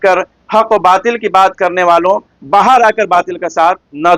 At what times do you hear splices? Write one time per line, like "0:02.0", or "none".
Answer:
none